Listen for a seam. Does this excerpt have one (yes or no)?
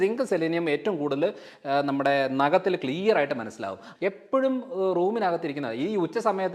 yes